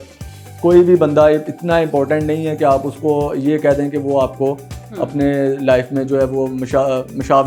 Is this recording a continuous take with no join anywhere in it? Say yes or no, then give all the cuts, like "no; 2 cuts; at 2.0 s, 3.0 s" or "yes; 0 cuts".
yes; 0 cuts